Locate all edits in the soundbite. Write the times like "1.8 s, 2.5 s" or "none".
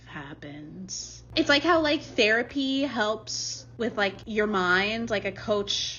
1.2 s